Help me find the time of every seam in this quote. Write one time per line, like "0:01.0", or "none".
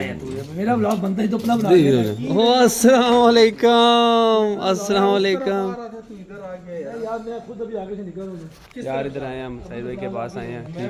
none